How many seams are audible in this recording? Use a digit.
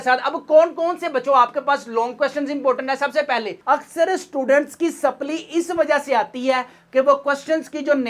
1